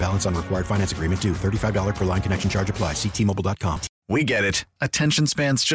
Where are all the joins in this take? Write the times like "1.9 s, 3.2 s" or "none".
3.9 s